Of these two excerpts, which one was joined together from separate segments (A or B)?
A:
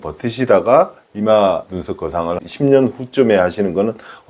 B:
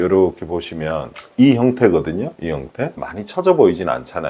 B